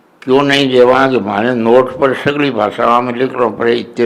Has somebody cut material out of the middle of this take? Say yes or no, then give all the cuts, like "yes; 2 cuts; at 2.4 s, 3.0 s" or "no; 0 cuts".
no; 0 cuts